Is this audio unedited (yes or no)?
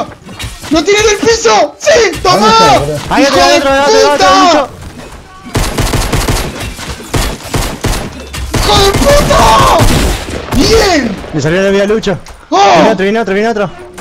yes